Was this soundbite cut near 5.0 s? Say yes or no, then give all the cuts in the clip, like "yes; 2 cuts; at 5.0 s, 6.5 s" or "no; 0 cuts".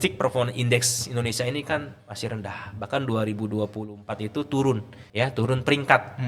yes; 1 cut; at 5.0 s